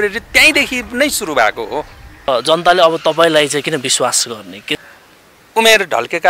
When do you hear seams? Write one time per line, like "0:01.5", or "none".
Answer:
0:02.0
0:04.8